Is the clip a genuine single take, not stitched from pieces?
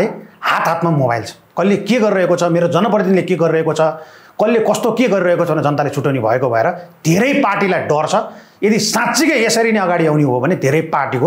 yes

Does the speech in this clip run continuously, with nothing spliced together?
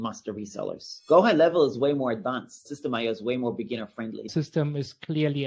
no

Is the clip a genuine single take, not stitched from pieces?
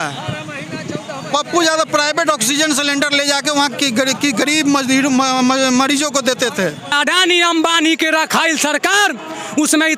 no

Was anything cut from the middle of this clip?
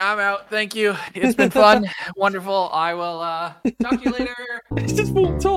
no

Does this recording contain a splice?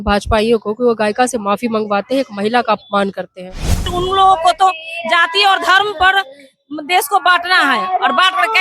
yes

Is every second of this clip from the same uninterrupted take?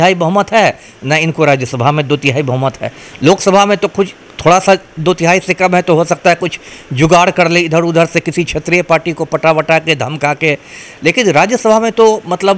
yes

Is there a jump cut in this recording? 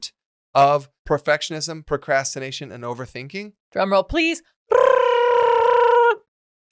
yes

